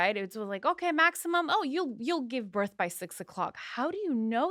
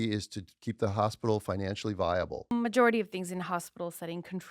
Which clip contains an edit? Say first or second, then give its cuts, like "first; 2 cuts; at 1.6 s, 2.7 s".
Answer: second; 1 cut; at 2.5 s